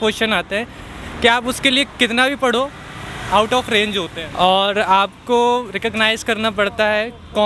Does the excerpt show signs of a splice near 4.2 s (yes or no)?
yes